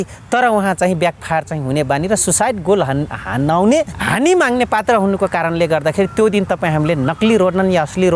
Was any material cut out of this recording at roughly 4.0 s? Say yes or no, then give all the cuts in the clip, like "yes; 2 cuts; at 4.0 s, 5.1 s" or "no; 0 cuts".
yes; 1 cut; at 4.0 s